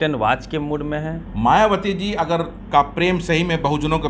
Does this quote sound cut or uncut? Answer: cut